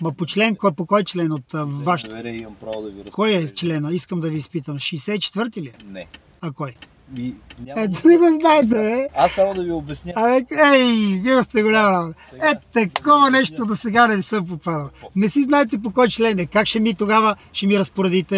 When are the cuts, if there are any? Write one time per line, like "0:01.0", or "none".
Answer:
none